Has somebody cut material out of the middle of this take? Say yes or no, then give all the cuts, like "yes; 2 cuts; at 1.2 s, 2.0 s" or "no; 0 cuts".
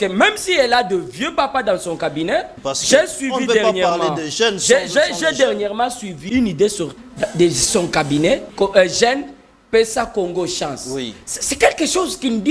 yes; 4 cuts; at 2.6 s, 6.2 s, 7.0 s, 8.5 s